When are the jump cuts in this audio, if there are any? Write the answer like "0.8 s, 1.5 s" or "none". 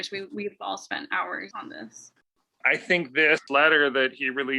1.5 s, 2.6 s, 3.4 s